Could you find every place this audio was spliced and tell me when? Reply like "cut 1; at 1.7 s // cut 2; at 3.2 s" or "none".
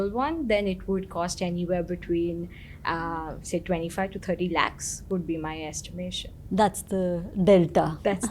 none